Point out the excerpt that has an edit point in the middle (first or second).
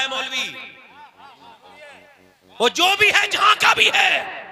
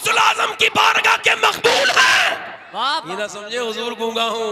second